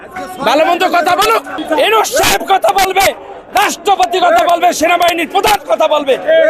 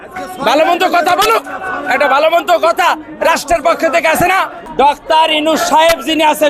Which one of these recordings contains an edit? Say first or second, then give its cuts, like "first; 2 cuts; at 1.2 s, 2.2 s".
first; 1 cut; at 1.5 s